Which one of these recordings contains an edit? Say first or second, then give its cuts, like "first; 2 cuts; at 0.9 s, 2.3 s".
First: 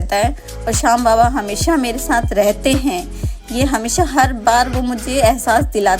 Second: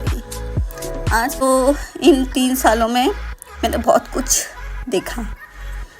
second; 1 cut; at 1.4 s